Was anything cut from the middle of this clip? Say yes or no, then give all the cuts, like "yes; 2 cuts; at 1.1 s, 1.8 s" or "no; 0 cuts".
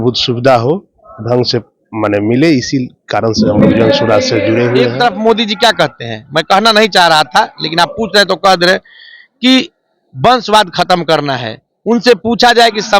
yes; 1 cut; at 4.9 s